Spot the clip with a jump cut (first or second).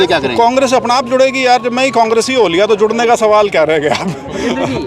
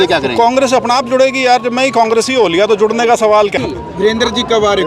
second